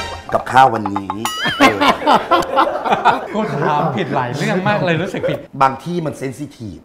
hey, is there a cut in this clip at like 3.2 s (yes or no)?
yes